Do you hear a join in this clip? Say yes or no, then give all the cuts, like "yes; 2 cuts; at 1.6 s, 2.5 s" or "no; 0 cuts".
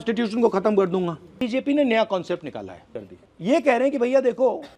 yes; 2 cuts; at 1.4 s, 3.0 s